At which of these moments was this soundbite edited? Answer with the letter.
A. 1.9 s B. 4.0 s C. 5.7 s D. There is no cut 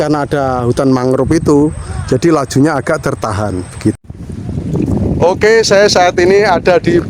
B